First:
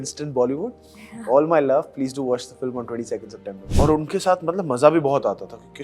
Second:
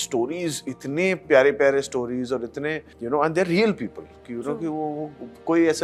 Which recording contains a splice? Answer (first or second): first